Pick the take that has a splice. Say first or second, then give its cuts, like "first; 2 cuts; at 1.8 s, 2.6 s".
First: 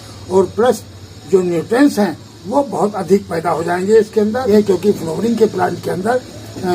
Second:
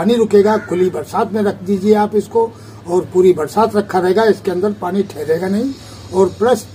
first; 1 cut; at 4.5 s